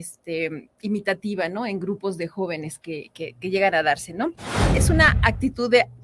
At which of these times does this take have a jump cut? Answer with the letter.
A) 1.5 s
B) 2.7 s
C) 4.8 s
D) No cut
C